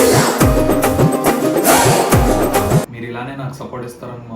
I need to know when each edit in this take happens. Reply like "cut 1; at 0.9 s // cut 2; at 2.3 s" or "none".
cut 1; at 2.9 s